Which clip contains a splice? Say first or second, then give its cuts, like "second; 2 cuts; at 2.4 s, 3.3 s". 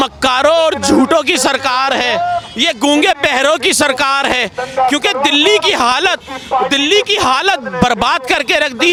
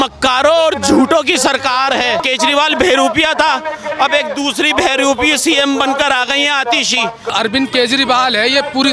second; 2 cuts; at 2.2 s, 7.3 s